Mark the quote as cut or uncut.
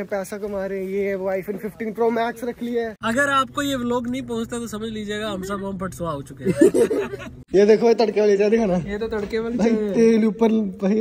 cut